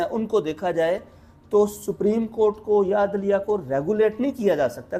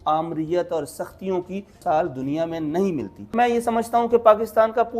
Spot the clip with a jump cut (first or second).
second